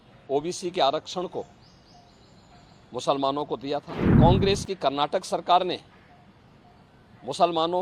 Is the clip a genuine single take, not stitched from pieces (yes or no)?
no